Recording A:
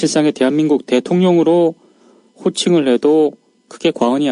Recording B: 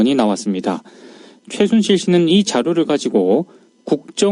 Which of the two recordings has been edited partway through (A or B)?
A